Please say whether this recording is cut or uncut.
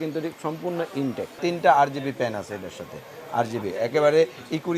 cut